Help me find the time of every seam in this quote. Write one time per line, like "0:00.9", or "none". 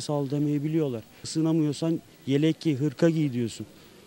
0:01.1